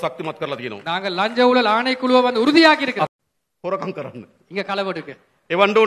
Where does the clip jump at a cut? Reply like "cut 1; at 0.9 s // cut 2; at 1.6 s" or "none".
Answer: cut 1; at 3.1 s